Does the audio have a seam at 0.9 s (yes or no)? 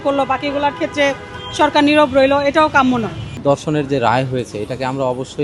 no